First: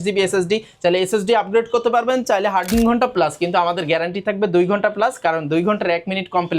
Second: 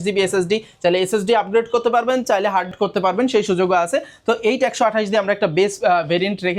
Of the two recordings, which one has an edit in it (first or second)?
first